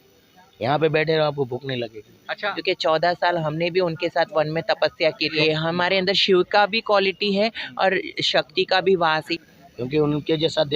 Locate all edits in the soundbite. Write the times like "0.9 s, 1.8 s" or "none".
2.5 s, 5.4 s, 9.3 s